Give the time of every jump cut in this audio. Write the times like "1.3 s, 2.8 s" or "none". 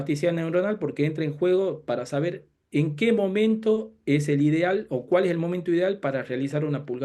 none